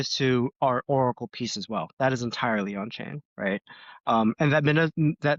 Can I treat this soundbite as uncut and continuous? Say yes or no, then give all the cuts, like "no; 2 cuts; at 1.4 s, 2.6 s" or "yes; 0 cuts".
yes; 0 cuts